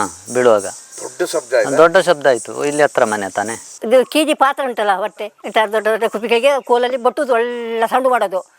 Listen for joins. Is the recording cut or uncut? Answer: cut